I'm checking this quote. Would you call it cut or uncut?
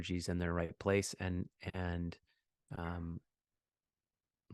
uncut